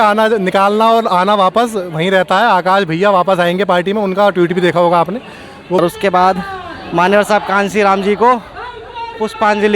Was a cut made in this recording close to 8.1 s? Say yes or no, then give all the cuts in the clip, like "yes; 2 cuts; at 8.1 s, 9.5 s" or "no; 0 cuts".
no; 1 cut; at 5.8 s